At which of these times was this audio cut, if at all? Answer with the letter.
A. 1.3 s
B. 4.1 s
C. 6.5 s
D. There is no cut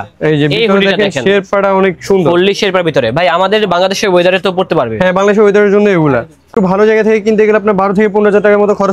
C